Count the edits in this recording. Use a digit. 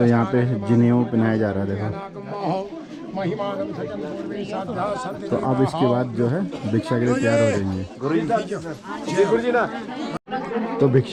0